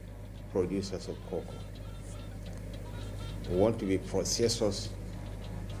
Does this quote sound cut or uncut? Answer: uncut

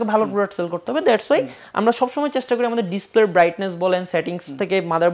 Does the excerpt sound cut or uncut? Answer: uncut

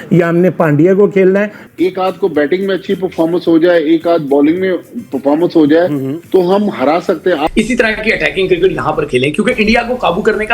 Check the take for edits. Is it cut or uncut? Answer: cut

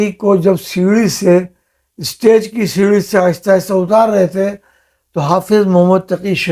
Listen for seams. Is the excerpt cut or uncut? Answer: uncut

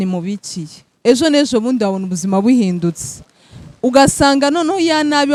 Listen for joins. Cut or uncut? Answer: uncut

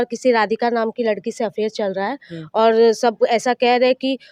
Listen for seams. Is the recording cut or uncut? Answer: uncut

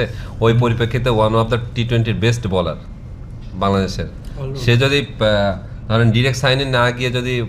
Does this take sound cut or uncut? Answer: uncut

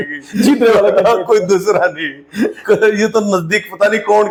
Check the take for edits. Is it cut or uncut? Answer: uncut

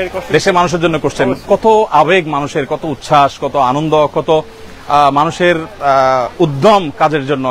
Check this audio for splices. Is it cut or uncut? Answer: uncut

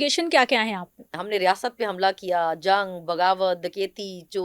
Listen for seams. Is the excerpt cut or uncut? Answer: cut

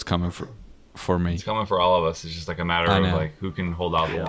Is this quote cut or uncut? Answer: cut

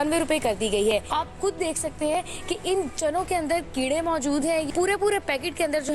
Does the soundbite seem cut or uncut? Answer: cut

